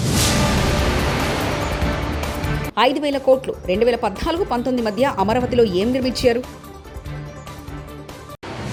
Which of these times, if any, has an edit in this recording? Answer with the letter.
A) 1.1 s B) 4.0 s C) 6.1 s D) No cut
D